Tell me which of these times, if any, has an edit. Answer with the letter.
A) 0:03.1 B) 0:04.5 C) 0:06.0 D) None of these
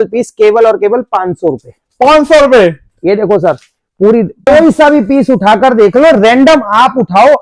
B